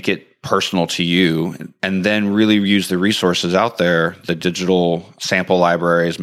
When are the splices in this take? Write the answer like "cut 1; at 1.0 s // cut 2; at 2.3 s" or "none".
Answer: cut 1; at 1.6 s